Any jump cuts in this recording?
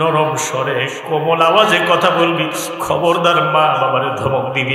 no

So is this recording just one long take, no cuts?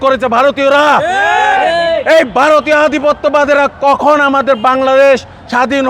yes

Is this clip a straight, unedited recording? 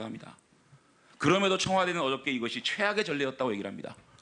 no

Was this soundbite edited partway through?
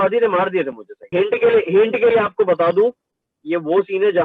yes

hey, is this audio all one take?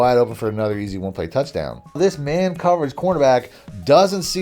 no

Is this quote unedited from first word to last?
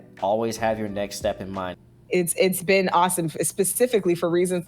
no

